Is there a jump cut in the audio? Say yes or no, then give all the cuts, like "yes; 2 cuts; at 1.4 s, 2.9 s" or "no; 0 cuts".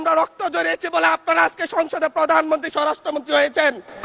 no; 0 cuts